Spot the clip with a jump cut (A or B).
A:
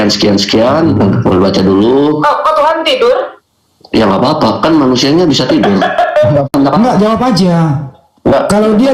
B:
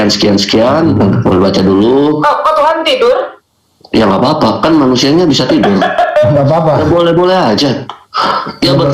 A